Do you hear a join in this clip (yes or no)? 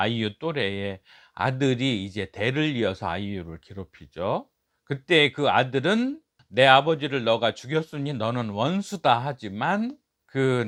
no